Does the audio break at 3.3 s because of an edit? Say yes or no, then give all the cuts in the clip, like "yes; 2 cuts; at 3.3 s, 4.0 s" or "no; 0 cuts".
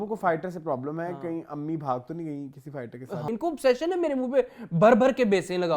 yes; 1 cut; at 3.3 s